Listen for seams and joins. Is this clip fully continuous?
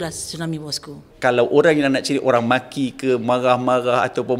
no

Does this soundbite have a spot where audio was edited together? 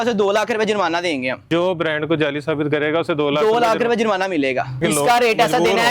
yes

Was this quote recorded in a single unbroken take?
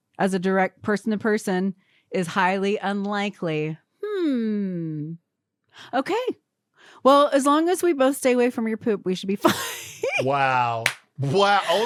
yes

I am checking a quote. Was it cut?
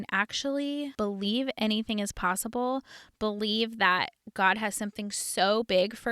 yes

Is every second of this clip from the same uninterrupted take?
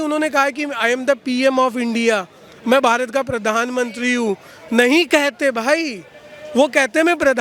yes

